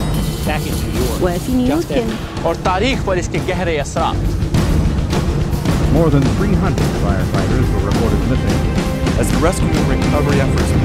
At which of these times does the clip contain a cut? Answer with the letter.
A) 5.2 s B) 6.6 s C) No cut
A